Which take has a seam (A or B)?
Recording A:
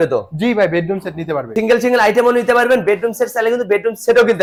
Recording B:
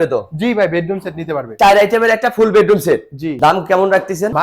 B